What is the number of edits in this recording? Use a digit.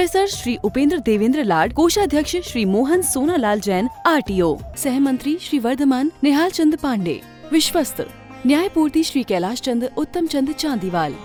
0